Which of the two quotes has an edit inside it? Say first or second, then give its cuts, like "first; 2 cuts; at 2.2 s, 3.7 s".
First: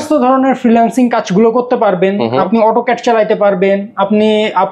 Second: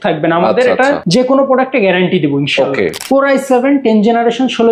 second; 2 cuts; at 1.0 s, 3.0 s